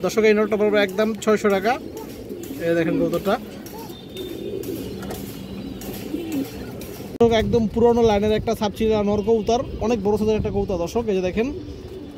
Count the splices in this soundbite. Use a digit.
0